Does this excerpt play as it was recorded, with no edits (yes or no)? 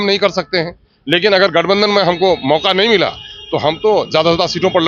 yes